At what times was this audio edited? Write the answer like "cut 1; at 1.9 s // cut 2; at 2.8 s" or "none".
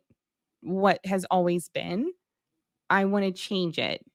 none